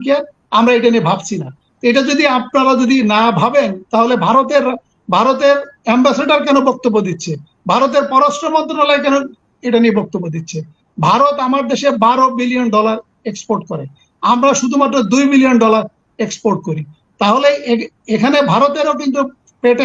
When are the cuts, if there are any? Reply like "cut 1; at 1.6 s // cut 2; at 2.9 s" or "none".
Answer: none

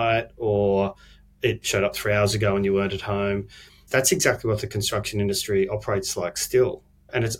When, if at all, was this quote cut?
none

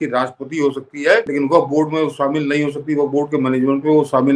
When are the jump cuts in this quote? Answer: cut 1; at 1.3 s

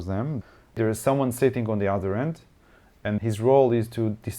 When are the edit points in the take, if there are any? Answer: cut 1; at 0.8 s // cut 2; at 3.2 s

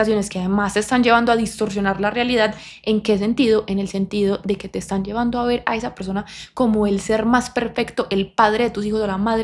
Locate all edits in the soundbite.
none

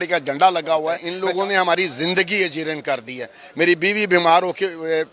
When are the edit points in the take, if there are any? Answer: cut 1; at 1.1 s

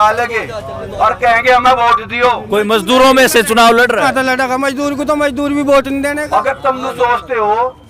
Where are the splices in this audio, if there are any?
cut 1; at 2.4 s // cut 2; at 4.1 s // cut 3; at 6.2 s

